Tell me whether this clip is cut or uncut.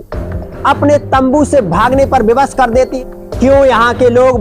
cut